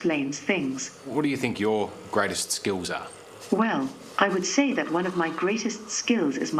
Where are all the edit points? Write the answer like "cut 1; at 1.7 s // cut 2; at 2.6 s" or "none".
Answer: cut 1; at 1.3 s